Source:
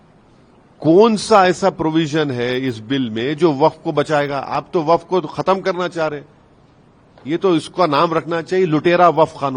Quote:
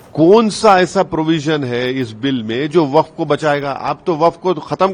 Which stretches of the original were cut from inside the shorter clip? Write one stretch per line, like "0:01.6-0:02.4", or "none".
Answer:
none